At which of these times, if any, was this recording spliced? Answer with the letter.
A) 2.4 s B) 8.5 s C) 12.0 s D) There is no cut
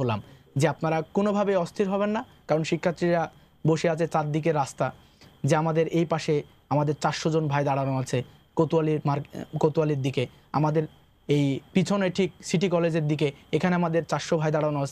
D